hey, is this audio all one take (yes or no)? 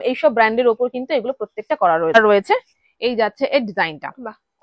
no